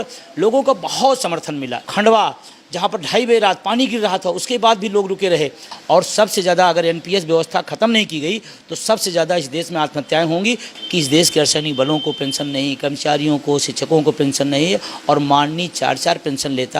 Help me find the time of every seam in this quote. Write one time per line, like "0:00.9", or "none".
0:01.8
0:05.7
0:10.7